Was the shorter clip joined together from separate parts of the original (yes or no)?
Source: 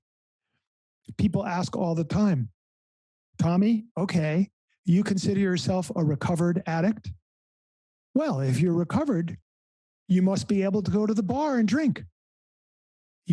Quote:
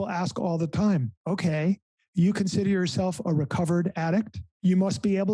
yes